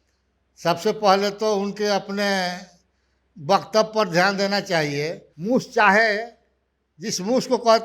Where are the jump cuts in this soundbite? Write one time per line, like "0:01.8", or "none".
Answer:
0:05.3